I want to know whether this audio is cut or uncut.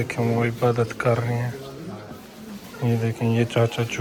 uncut